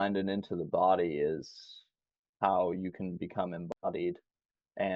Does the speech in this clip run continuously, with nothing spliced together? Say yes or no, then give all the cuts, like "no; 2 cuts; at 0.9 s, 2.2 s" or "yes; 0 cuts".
yes; 0 cuts